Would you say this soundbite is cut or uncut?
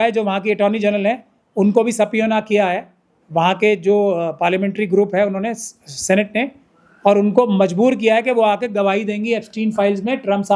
uncut